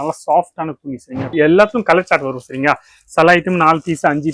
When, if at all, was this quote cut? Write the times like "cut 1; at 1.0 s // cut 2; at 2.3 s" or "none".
cut 1; at 1.3 s